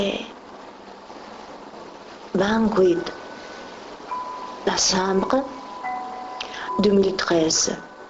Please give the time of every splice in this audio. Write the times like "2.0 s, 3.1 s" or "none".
5.9 s

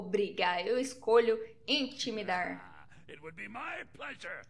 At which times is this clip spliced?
none

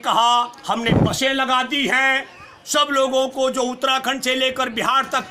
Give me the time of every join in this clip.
none

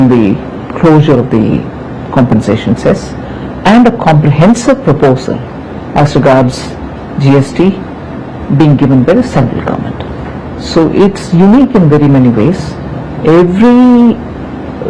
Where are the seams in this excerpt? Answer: none

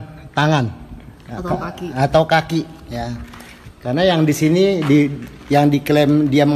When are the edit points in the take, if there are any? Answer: none

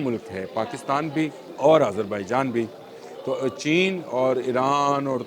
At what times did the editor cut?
1.4 s

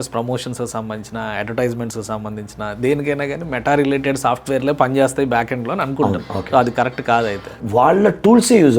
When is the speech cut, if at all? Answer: 7.5 s

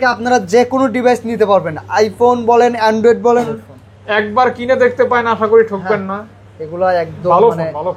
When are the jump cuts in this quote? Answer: 3.5 s

